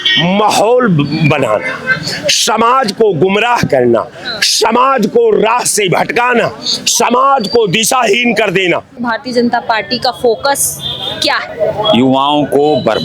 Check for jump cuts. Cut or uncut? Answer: cut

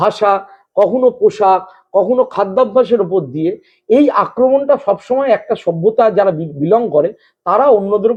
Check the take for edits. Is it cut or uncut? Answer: uncut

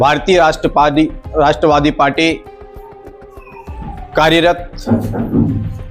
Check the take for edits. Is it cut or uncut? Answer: uncut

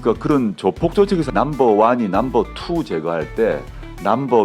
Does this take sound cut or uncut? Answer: cut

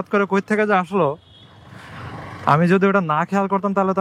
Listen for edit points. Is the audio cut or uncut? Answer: uncut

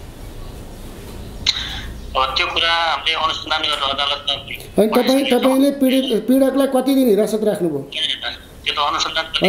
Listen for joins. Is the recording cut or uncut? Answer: uncut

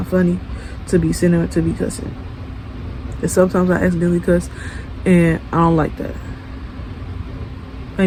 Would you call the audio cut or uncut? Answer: uncut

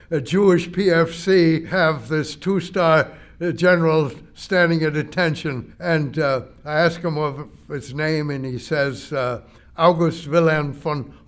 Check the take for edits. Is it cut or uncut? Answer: cut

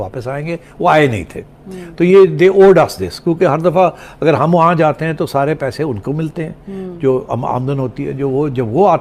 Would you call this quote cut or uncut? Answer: uncut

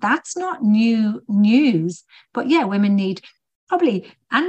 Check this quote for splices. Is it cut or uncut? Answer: uncut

